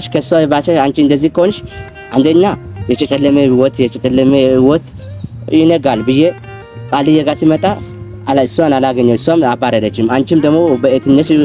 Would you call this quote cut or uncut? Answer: uncut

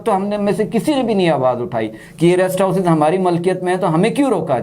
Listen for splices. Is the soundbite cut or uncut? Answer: uncut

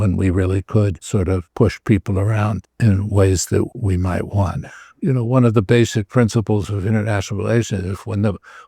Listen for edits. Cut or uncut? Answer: cut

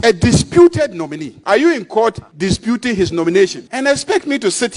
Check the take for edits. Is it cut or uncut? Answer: cut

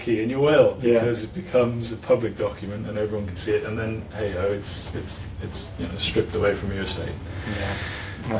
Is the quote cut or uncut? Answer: uncut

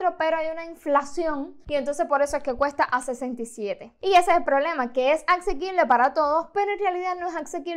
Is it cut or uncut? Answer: uncut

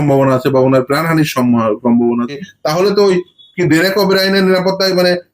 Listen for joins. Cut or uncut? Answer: cut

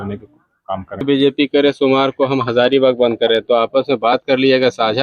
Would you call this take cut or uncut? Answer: cut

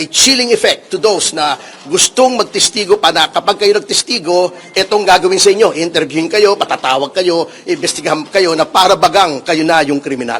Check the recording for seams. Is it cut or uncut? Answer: uncut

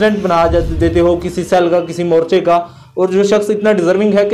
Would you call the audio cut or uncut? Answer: uncut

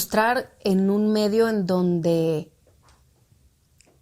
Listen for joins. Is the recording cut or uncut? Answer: uncut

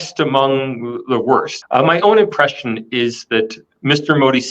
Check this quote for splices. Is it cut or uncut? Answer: cut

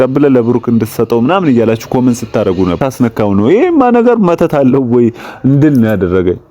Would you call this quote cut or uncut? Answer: cut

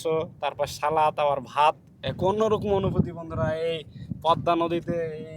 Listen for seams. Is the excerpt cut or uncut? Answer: cut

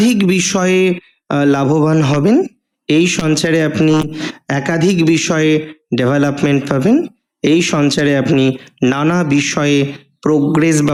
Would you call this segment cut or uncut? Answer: uncut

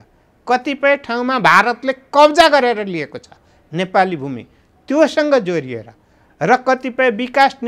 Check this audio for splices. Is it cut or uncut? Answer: uncut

